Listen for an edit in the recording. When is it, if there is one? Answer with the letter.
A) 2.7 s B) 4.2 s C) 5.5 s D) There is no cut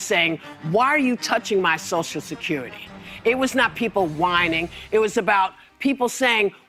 D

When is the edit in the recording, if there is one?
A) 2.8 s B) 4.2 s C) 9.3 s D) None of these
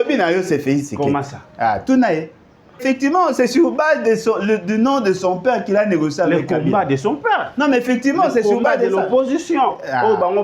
A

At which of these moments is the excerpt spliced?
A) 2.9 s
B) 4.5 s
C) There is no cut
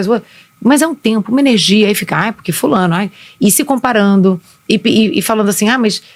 C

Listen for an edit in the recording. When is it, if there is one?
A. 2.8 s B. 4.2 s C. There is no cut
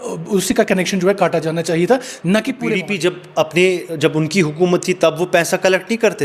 A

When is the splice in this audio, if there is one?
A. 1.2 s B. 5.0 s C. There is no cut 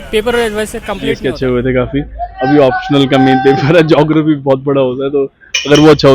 A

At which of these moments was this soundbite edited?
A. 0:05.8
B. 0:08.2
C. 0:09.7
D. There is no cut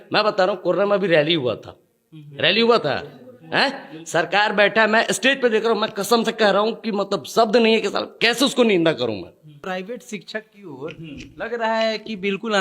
C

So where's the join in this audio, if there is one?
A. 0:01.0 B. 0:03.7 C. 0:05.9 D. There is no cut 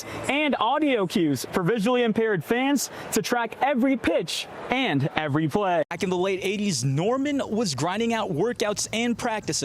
C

